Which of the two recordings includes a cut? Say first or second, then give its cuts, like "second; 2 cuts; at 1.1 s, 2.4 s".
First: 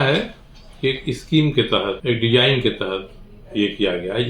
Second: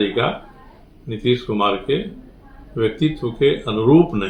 first; 1 cut; at 2.0 s